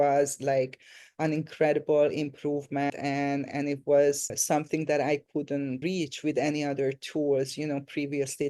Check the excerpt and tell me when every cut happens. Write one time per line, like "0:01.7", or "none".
0:02.9
0:04.4
0:05.8